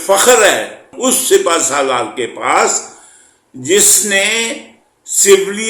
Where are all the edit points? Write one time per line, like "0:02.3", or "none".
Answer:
0:00.9